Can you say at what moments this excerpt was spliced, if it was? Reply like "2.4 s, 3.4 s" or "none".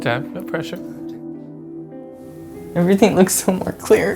none